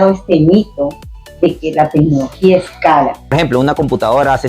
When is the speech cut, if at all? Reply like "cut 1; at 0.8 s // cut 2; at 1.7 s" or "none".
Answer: cut 1; at 3.3 s